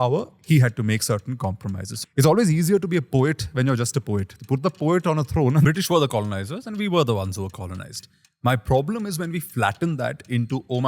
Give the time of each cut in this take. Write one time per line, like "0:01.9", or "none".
0:01.9
0:05.6